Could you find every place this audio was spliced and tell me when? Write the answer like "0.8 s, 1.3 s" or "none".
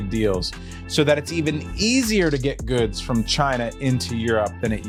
none